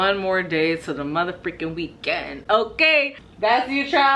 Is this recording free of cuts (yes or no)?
no